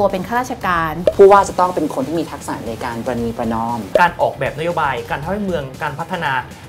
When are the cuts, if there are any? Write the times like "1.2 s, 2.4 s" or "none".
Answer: 1.0 s, 3.9 s

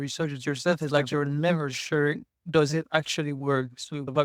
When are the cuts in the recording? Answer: none

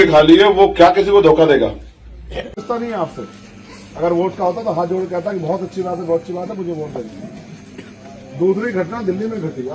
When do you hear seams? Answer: 2.6 s

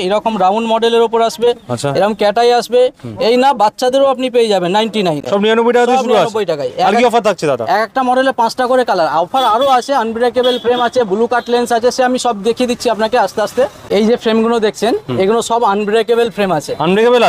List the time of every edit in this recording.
none

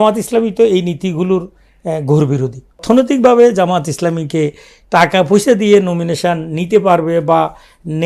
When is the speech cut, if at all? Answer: 2.8 s

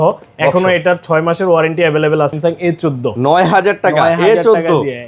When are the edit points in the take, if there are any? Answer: 2.4 s

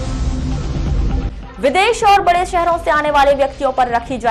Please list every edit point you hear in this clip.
1.3 s

